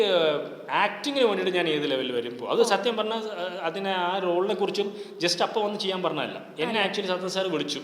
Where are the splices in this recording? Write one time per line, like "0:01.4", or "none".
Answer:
none